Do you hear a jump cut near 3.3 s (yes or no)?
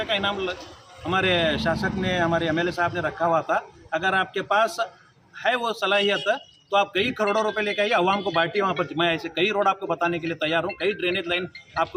no